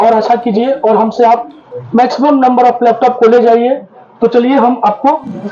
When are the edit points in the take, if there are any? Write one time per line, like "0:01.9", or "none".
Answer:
none